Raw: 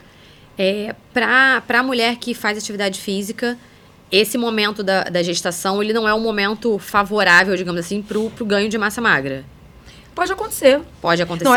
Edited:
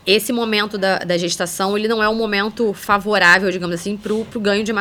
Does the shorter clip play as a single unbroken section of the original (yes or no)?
yes